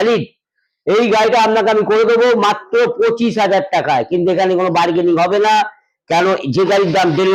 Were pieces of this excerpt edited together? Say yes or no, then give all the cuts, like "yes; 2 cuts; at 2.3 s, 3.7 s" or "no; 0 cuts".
no; 0 cuts